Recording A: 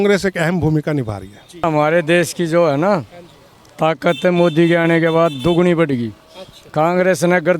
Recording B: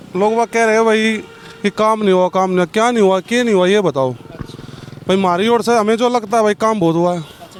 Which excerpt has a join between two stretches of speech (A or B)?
A